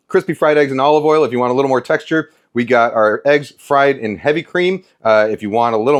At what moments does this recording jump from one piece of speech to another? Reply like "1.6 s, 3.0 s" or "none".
none